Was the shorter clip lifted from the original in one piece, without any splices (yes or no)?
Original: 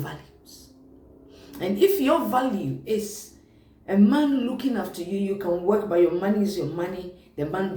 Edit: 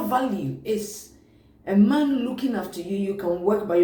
yes